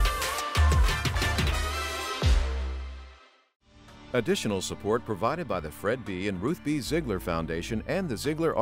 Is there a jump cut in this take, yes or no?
yes